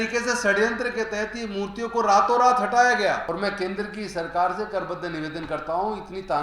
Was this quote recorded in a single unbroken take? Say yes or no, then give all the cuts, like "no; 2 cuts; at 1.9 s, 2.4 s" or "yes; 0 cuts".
no; 1 cut; at 3.2 s